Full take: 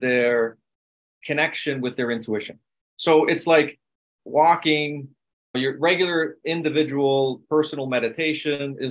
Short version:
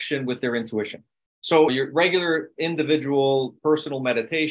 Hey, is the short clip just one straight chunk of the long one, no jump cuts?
no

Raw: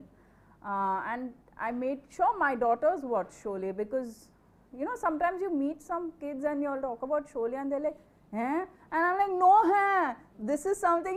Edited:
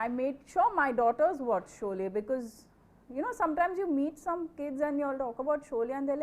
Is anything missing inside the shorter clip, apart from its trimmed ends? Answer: no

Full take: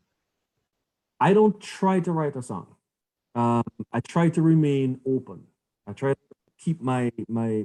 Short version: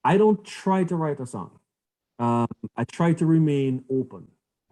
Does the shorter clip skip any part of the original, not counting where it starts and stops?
no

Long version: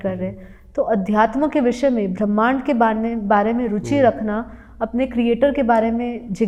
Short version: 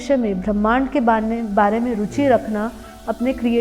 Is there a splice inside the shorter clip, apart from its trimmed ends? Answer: no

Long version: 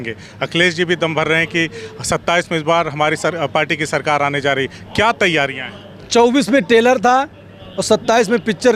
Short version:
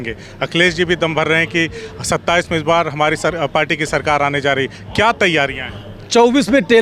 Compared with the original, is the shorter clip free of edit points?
yes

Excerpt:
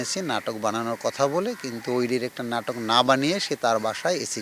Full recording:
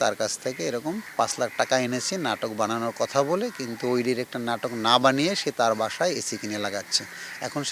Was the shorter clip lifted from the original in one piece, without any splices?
yes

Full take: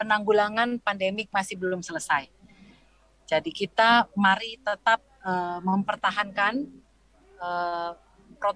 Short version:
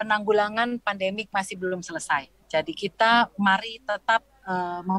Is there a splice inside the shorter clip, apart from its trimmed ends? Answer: yes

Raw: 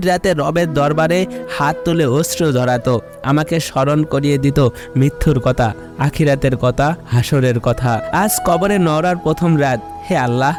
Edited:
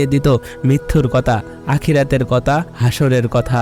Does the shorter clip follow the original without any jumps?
yes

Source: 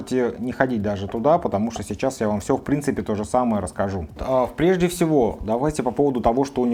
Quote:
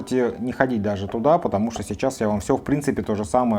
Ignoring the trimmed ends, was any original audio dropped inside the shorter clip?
no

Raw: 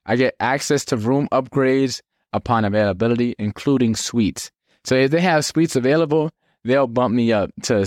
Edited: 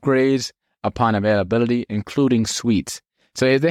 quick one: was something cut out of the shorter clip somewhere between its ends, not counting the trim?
no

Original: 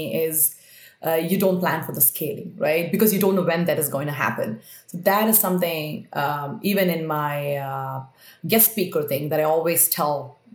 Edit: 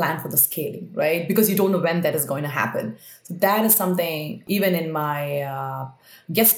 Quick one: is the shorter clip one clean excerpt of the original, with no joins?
no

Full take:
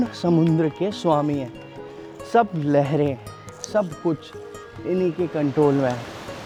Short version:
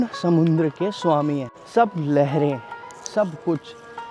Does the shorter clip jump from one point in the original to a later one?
yes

